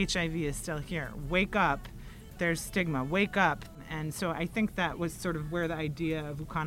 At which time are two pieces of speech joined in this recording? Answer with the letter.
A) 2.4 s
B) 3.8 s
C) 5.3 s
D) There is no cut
B